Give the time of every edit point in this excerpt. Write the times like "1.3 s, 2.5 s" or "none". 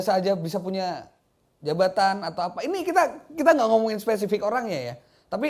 none